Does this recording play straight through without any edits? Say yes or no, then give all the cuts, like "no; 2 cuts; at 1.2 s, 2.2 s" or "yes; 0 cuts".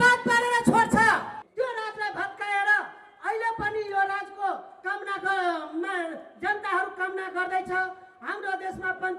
no; 1 cut; at 1.4 s